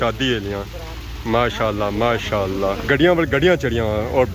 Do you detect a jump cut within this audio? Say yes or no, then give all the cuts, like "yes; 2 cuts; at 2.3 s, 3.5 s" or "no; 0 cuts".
yes; 1 cut; at 2.8 s